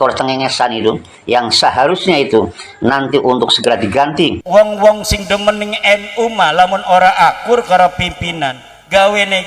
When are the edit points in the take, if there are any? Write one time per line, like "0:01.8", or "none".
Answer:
0:04.4